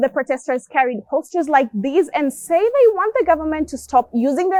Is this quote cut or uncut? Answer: uncut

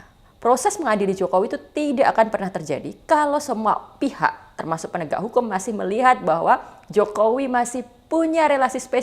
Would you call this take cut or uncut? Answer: uncut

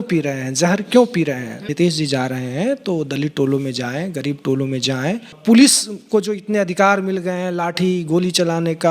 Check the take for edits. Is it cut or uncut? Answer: cut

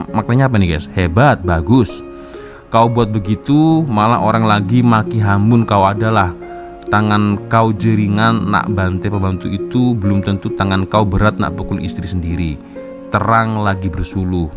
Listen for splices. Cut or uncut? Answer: uncut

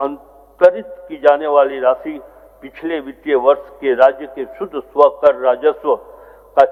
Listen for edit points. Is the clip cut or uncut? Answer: uncut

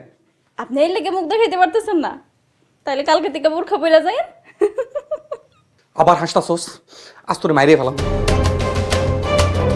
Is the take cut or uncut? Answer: cut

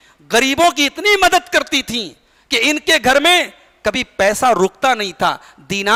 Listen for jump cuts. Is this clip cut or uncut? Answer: uncut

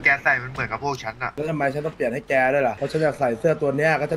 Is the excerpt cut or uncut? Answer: cut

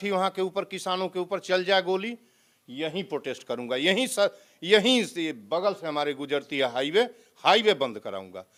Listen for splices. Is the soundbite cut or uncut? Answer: uncut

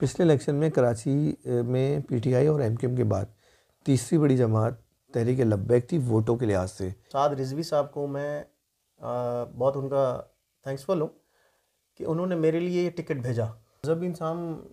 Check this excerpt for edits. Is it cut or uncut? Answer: cut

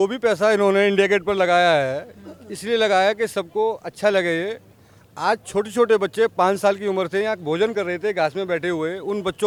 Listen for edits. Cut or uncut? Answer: uncut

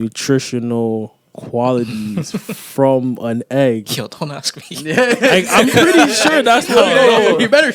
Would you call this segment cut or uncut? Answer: uncut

